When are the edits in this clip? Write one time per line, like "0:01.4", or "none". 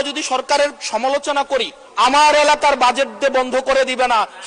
0:01.8

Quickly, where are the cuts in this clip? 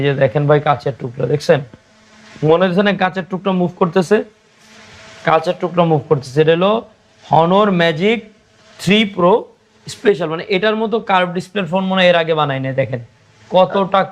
none

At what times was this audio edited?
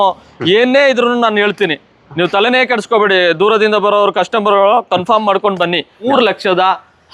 0:06.1

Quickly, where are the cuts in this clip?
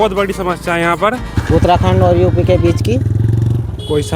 0:01.3

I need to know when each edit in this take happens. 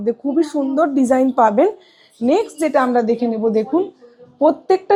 none

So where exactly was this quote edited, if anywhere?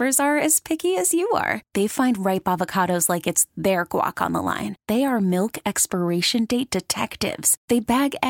none

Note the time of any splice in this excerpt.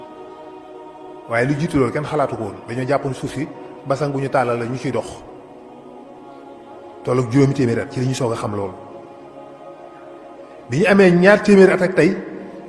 0:08.8
0:10.7

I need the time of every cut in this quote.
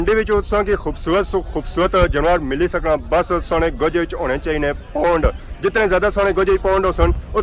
none

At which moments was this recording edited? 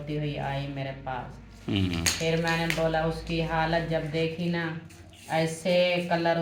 none

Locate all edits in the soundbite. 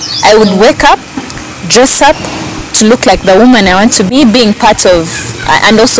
0:04.1

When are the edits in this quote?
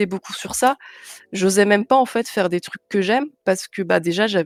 none

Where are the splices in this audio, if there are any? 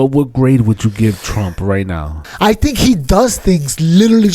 0:02.3

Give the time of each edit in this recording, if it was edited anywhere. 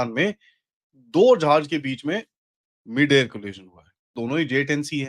0:04.1

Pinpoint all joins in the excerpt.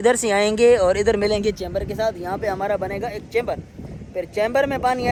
none

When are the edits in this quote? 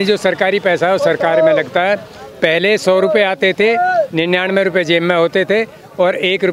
none

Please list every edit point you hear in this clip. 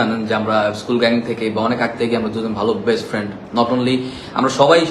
none

